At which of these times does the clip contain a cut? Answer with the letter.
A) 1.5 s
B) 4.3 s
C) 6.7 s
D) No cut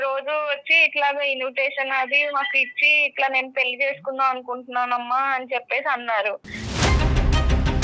C